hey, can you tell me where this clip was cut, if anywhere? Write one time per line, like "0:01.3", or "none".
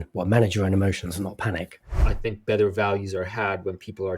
0:02.0